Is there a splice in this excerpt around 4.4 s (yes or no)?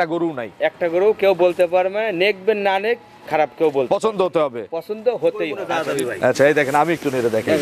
no